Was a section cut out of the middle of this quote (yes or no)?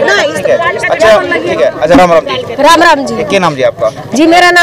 no